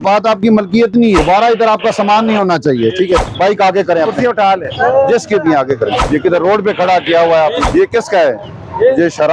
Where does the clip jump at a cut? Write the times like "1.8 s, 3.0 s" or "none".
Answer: 1.2 s, 3.3 s, 6.0 s, 7.6 s